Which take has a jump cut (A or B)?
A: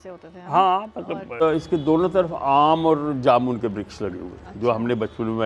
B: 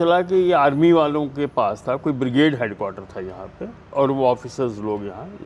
A